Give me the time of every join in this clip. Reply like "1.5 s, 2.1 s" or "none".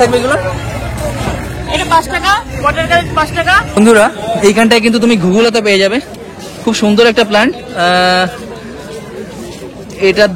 3.7 s